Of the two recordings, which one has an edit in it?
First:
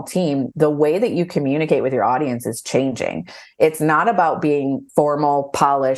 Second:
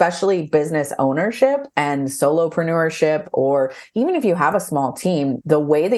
first; 1 cut; at 4.8 s

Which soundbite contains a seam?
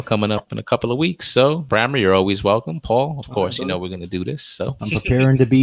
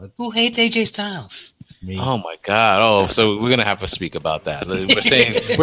first; 2 cuts; at 1.6 s, 4.8 s

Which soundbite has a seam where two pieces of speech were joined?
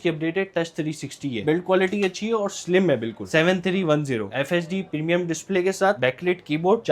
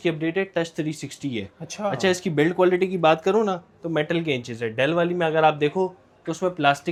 first; 3 cuts; at 1.4 s, 3.3 s, 4.3 s

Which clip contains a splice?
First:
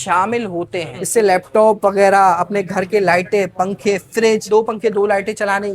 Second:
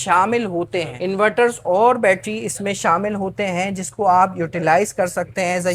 first; 2 cuts; at 1.0 s, 4.5 s

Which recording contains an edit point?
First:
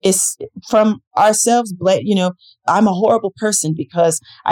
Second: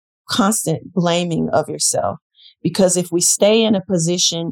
first; 1 cut; at 2.5 s

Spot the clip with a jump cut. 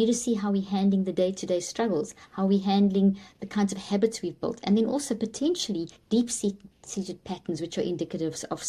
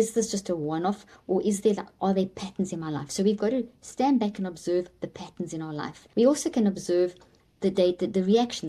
second; 1 cut; at 6.0 s

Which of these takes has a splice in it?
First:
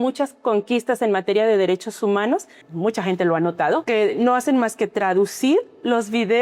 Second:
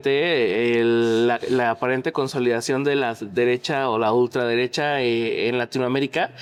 first; 2 cuts; at 2.6 s, 3.8 s

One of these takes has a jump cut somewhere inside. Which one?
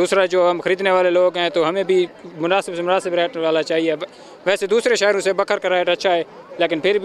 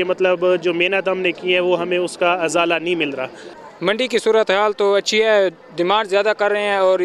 second; 1 cut; at 3.5 s

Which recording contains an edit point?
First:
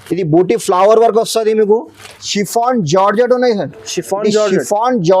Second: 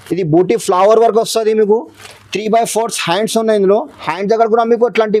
first; 1 cut; at 2.3 s

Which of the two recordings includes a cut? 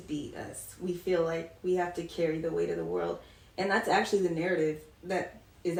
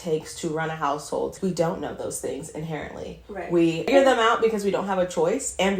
second; 2 cuts; at 1.4 s, 3.9 s

